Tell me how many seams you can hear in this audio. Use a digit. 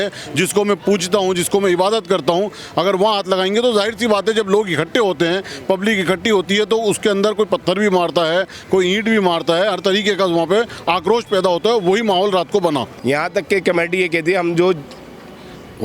1